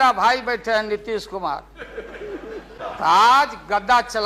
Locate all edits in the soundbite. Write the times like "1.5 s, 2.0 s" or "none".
2.7 s